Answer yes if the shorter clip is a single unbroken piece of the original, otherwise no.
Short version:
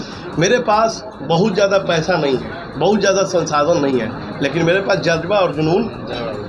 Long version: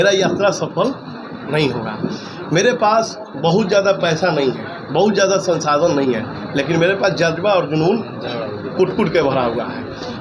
yes